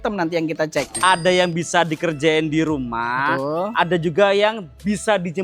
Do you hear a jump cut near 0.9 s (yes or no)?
yes